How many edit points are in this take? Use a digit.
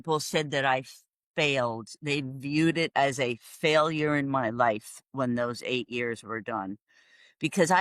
0